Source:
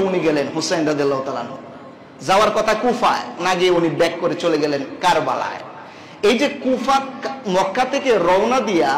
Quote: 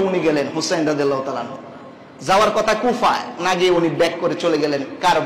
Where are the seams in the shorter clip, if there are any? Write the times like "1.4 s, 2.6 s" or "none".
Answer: none